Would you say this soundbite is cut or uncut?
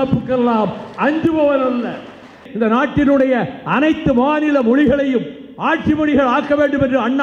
cut